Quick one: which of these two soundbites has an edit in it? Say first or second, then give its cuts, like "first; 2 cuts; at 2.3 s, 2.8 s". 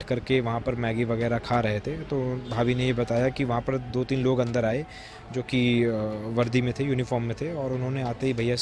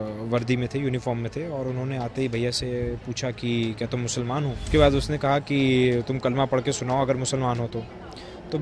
second; 1 cut; at 4.6 s